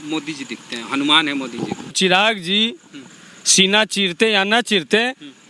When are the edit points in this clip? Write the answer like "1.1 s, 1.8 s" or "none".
1.9 s